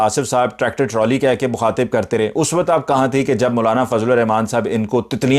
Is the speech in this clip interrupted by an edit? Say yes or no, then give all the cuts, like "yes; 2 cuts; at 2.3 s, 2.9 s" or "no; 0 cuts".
no; 0 cuts